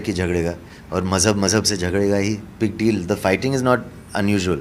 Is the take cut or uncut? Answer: cut